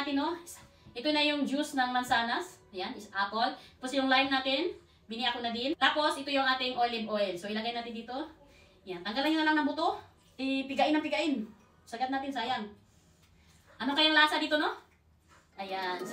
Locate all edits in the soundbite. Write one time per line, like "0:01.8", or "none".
none